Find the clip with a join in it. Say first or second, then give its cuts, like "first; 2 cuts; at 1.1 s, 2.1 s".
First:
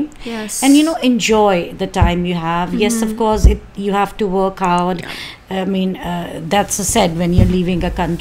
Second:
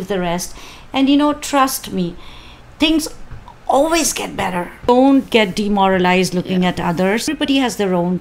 second; 2 cuts; at 4.9 s, 7.3 s